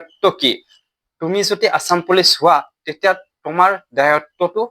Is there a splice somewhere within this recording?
no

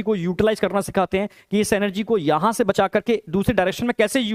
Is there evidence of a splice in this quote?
no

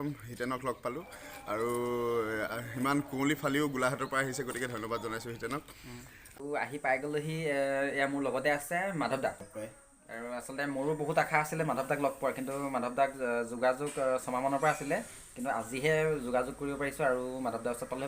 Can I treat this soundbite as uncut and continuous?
no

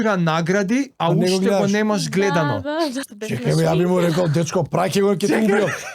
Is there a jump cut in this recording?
yes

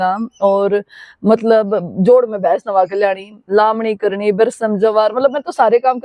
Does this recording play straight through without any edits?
yes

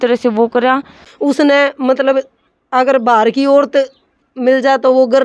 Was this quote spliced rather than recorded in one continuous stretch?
yes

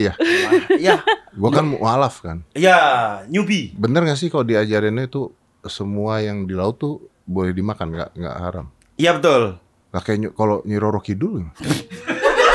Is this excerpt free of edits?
yes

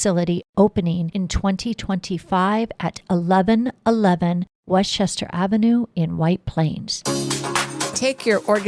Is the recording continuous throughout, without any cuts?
no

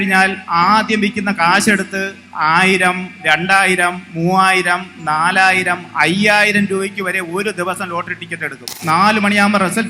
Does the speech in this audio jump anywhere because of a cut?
yes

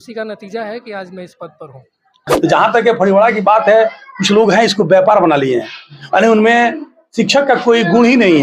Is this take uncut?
no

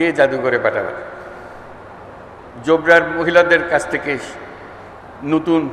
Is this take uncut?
no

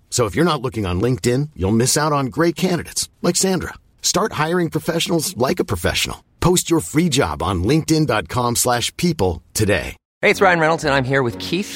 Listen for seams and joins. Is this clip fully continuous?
no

